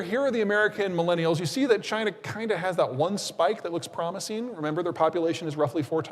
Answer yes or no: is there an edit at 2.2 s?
no